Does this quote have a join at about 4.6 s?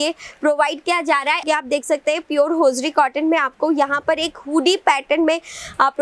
no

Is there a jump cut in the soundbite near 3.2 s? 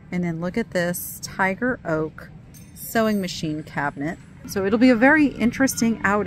no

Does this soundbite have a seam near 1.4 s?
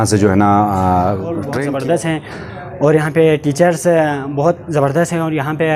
yes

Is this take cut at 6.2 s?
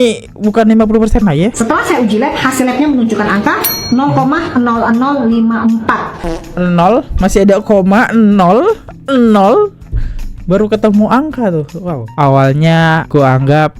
yes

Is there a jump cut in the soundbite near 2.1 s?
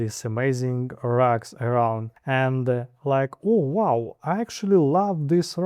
yes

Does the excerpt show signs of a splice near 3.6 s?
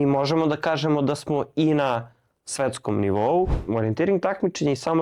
yes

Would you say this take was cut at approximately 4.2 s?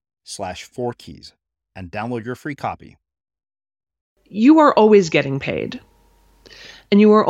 yes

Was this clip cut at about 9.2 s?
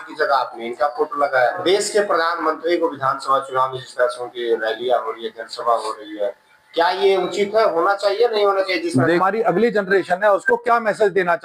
yes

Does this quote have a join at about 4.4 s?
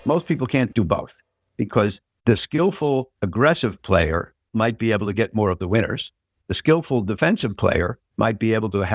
yes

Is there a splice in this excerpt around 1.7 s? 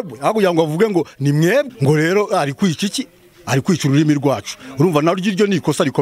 yes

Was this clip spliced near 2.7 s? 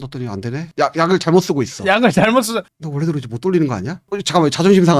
yes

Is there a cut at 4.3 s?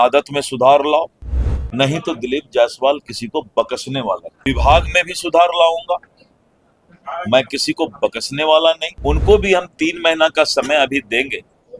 yes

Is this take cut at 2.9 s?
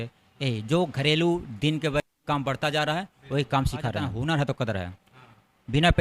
no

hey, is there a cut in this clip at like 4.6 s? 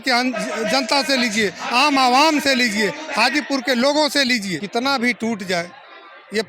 yes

